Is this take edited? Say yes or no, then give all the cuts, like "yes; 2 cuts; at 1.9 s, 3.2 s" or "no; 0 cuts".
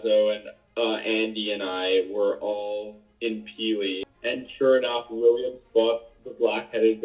yes; 1 cut; at 4.1 s